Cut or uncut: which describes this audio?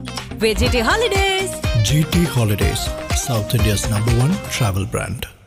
uncut